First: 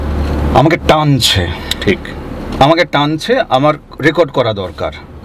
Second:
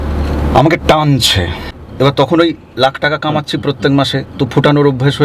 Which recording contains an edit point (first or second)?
second